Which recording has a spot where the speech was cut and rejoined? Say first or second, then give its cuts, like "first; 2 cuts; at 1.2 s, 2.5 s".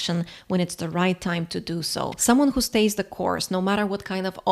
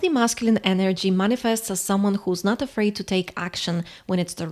first; 1 cut; at 2.1 s